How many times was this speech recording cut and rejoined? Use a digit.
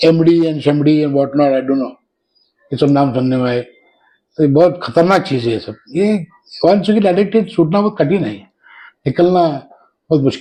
0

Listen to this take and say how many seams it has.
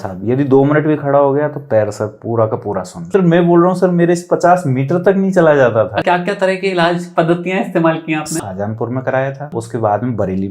4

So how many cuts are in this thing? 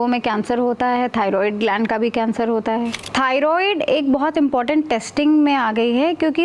1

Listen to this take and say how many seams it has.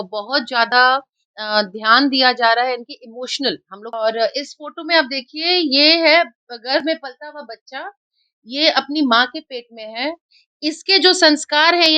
1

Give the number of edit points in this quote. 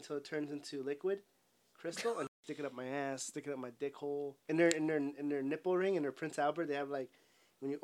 2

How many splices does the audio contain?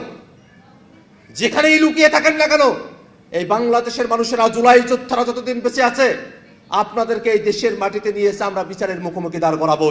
0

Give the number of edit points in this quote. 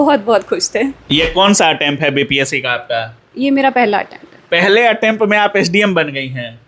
1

